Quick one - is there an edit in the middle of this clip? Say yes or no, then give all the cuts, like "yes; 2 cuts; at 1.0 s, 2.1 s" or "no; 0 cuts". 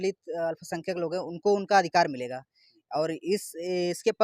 no; 0 cuts